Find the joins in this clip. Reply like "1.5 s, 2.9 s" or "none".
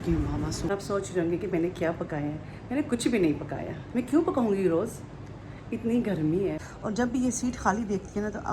0.7 s, 6.6 s